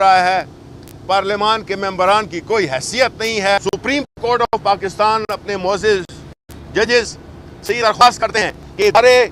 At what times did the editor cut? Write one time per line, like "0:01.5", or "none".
0:03.6